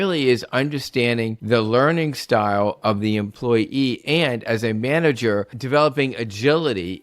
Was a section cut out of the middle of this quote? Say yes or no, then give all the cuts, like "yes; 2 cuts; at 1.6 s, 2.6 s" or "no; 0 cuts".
yes; 2 cuts; at 1.4 s, 5.6 s